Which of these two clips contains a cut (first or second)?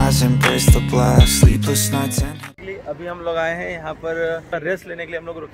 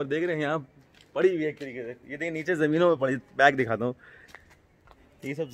first